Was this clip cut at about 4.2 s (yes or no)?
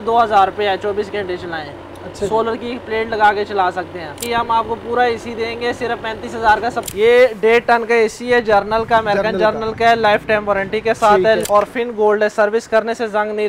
yes